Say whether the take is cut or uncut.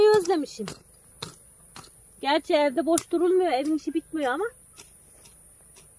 uncut